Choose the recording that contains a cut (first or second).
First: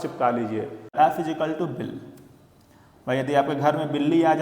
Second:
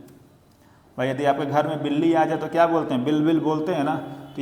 first